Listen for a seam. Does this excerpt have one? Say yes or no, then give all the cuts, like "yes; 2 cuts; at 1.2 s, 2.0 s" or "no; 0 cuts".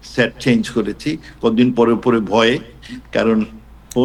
no; 0 cuts